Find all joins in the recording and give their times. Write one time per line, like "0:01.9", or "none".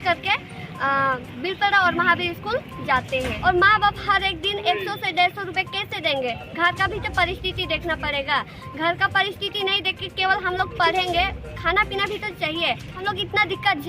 0:03.4
0:12.9